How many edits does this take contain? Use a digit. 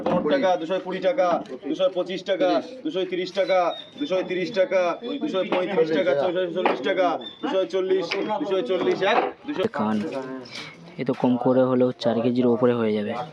1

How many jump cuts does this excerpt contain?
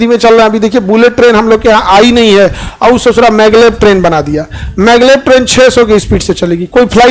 0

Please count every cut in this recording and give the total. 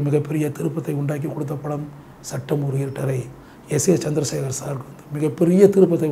0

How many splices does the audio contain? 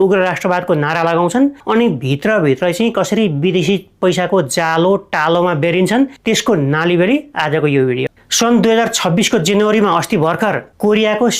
1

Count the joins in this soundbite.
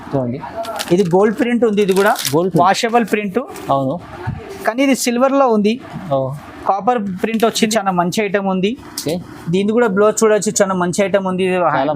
1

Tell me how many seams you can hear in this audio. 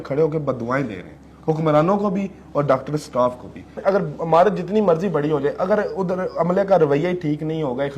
1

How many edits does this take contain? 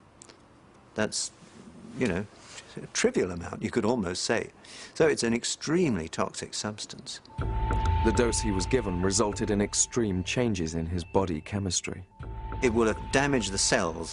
1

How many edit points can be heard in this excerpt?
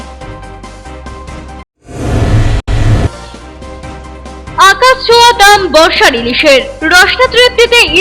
1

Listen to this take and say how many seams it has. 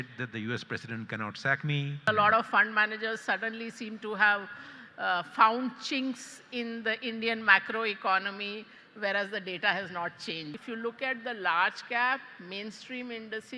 2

